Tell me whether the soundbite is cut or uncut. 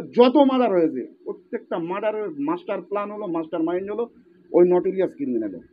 uncut